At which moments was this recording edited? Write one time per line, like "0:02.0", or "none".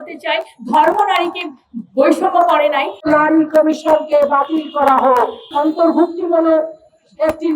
0:02.9
0:05.5